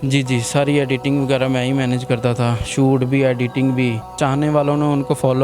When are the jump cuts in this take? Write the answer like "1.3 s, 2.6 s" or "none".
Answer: 4.2 s